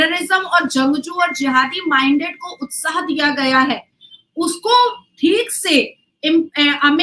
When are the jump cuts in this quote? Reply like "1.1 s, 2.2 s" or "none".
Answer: none